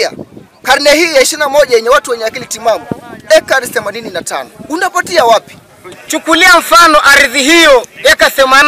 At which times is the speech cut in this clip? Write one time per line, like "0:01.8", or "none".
0:06.0